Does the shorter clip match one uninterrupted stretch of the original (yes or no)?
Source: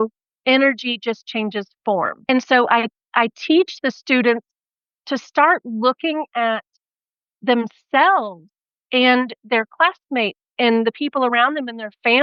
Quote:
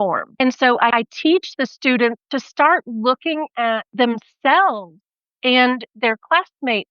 no